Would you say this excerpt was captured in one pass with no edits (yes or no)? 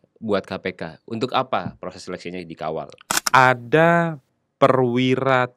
no